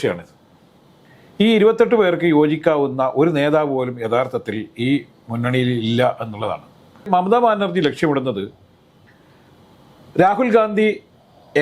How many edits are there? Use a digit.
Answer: 1